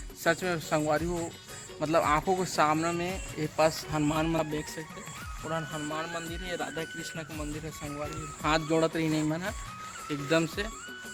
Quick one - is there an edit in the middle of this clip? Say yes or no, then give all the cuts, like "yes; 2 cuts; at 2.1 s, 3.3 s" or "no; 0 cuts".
no; 0 cuts